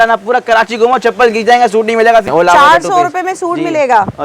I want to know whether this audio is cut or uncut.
cut